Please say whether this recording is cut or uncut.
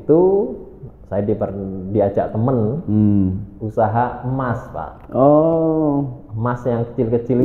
uncut